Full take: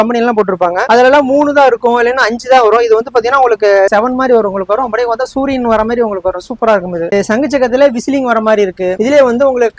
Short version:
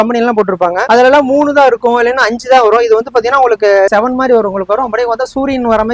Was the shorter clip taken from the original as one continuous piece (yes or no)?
yes